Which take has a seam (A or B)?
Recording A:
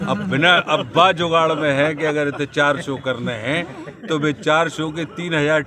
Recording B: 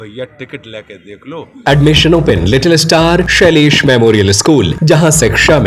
B